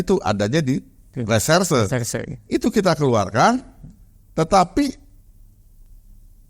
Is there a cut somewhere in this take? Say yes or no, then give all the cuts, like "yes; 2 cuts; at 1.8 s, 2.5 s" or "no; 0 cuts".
no; 0 cuts